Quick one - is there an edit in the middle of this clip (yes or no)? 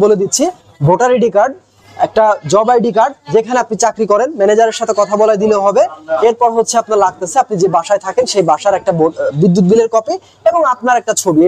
no